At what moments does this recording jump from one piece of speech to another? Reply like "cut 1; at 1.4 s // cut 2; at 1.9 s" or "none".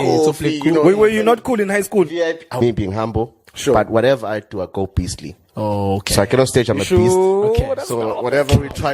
cut 1; at 2.6 s